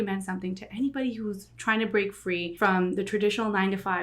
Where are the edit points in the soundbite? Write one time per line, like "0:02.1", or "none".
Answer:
0:02.5